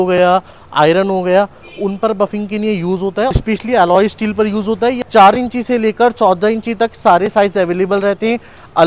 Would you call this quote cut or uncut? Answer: uncut